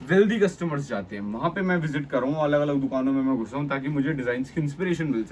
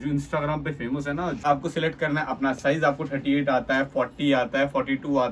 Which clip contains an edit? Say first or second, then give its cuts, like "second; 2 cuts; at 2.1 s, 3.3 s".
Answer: second; 1 cut; at 1.4 s